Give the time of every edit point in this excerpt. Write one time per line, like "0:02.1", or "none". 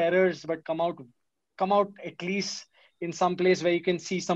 none